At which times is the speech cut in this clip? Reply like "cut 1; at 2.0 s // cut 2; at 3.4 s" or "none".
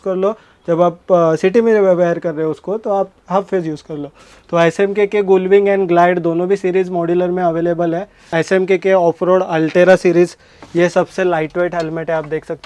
cut 1; at 8.3 s